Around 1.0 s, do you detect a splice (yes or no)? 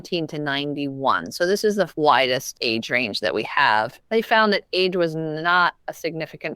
no